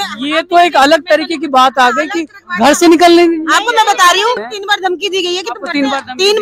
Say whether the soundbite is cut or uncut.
cut